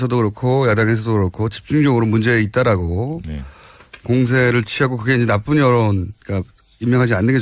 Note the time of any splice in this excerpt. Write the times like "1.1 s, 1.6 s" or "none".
none